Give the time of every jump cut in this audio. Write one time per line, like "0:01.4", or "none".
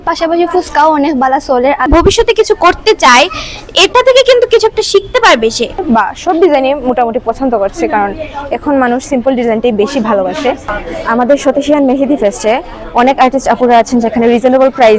0:01.9
0:05.8
0:10.7